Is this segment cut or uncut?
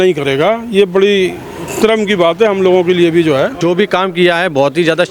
cut